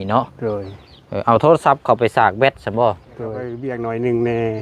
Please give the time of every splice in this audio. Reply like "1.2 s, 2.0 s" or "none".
3.5 s